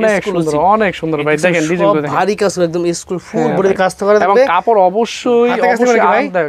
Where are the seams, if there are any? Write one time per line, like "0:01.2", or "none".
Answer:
none